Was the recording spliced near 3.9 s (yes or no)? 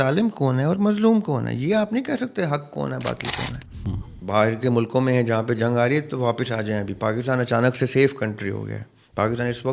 yes